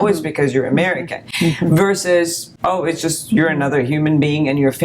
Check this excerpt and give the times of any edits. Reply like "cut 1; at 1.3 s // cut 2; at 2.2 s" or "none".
cut 1; at 2.5 s